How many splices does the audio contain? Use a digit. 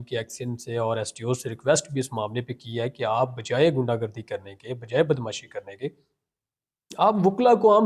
0